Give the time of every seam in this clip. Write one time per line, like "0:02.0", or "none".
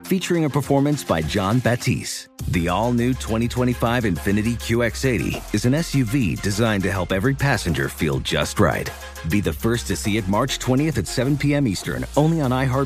none